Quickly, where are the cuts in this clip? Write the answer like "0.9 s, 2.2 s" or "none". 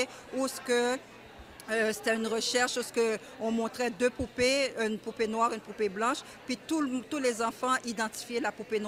none